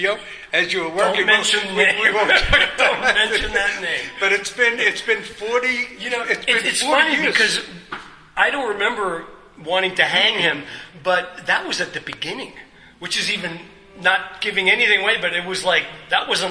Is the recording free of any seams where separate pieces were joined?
yes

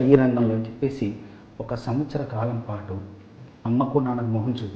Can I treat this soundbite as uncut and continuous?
no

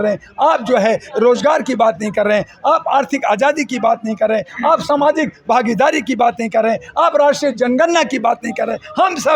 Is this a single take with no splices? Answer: yes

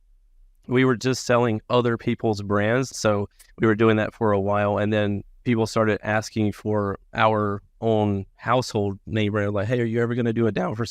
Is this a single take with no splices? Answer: no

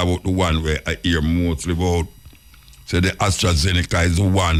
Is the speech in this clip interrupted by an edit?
no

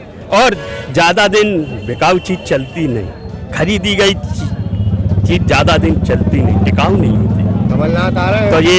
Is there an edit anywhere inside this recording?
no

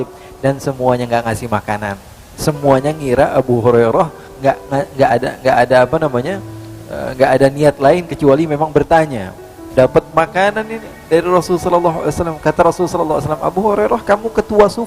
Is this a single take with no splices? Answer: no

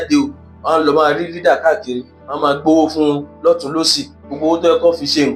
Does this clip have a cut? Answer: no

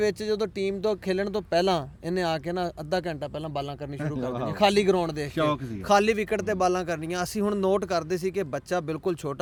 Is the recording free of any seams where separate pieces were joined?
yes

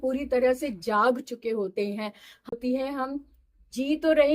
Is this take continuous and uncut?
no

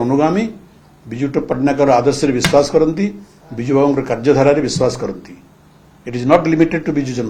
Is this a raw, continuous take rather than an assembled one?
yes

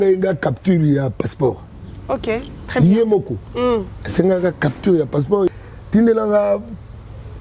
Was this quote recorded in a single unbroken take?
no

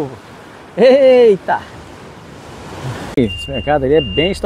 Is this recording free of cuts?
no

